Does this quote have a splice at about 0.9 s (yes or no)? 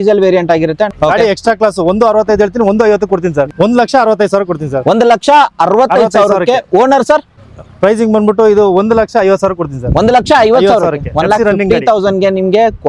yes